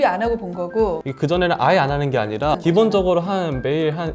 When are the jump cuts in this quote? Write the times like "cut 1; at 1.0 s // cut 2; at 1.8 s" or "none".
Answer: cut 1; at 1.1 s // cut 2; at 2.5 s